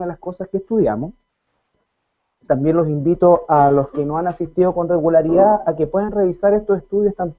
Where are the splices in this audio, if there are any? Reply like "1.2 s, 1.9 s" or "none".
none